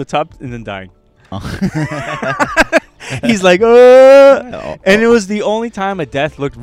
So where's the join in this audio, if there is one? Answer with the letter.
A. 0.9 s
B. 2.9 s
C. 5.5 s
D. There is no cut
D